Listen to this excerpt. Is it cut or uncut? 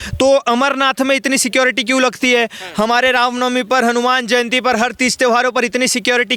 uncut